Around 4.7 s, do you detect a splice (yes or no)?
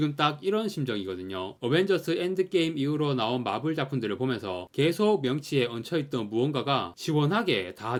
no